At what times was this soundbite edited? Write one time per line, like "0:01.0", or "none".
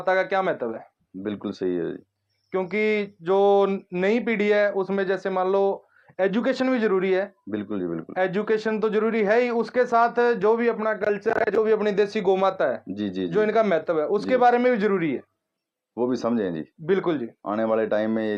none